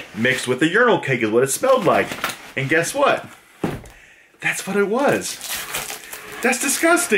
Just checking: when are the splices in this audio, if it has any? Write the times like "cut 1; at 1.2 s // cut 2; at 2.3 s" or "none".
none